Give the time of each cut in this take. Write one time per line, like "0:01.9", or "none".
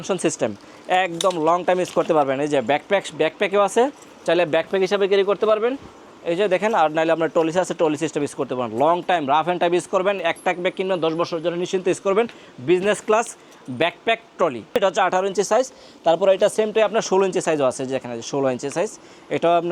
none